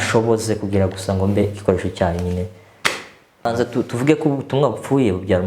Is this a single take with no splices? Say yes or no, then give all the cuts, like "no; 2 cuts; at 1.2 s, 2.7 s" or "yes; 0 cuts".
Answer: no; 1 cut; at 3.5 s